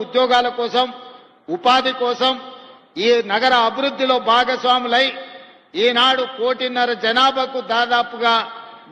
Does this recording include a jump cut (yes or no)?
no